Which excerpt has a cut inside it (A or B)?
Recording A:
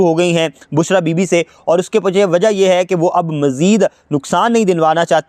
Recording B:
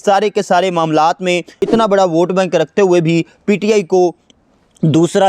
B